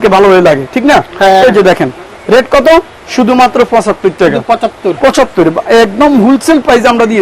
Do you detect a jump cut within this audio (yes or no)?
no